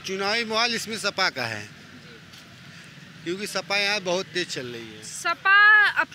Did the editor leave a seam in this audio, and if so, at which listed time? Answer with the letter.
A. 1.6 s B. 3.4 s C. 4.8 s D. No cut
D